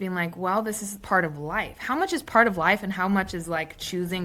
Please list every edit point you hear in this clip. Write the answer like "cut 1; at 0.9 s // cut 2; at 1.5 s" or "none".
cut 1; at 1.0 s